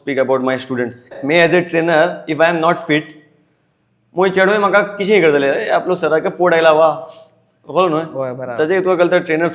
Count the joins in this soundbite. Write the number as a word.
one